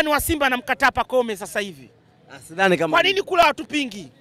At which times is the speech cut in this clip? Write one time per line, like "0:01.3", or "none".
none